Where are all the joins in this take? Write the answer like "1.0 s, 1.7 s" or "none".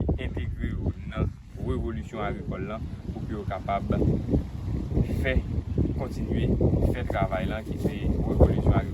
none